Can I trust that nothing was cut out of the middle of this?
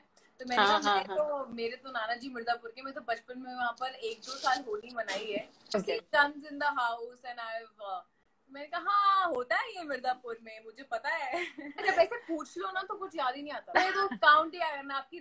no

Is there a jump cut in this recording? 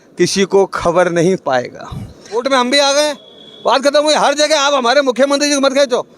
yes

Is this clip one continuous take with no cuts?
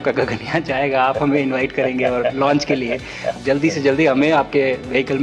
no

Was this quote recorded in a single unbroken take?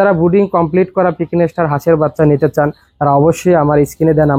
yes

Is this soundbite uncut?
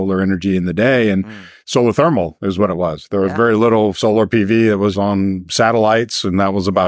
no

